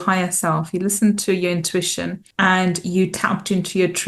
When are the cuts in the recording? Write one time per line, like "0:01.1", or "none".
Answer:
0:02.2